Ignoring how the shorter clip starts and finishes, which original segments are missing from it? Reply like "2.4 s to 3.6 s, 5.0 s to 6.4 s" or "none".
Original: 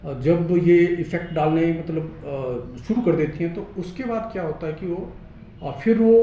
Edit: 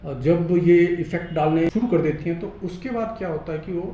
1.7 s to 2.8 s